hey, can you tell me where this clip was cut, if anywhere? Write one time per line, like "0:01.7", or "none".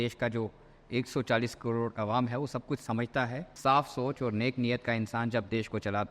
0:03.4